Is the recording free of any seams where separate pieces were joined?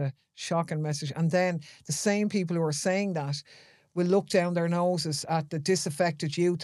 yes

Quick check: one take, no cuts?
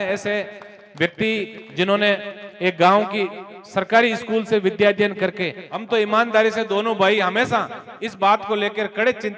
no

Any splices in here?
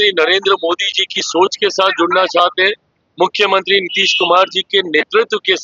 no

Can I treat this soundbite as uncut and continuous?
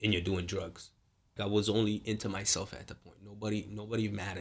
no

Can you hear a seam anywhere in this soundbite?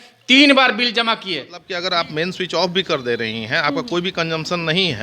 yes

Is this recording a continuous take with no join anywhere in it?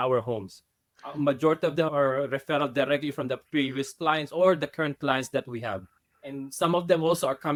yes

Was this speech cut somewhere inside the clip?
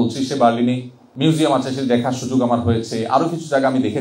yes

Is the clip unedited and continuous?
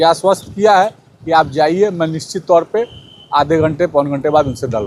yes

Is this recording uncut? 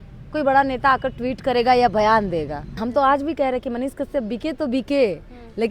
no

